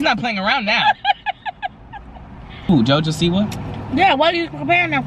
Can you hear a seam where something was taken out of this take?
yes; 1 cut; at 2.7 s

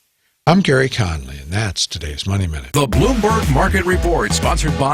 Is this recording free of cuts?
no; 1 cut; at 2.7 s

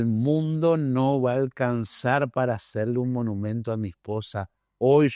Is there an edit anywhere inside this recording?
no; 0 cuts

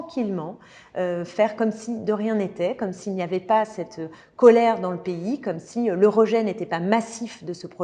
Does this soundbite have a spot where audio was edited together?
no; 0 cuts

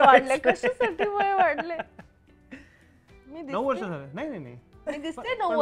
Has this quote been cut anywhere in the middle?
no; 0 cuts

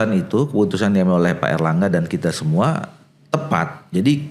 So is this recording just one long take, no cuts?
yes; 0 cuts

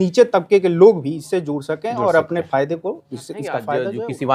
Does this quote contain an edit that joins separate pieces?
no; 0 cuts

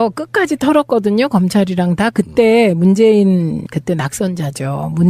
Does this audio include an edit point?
no; 0 cuts

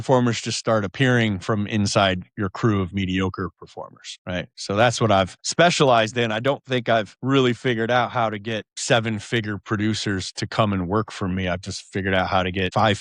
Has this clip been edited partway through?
no; 0 cuts

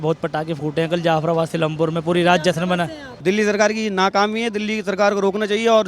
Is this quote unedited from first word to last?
no; 1 cut; at 3.0 s

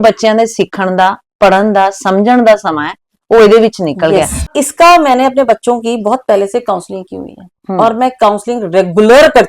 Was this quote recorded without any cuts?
no; 1 cut; at 4.5 s

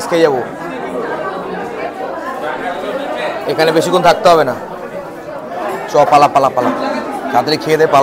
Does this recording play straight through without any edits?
yes; 0 cuts

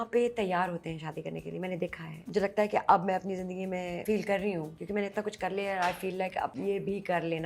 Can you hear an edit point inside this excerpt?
yes; 4 cuts; at 2.1 s, 4.0 s, 4.8 s, 6.5 s

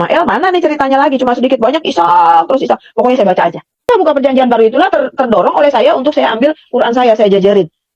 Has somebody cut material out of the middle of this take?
yes; 1 cut; at 3.9 s

